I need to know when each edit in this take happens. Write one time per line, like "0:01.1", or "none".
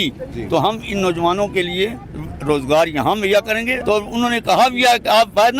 0:03.7